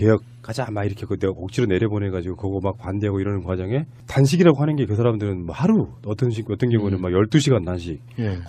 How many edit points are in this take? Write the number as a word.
one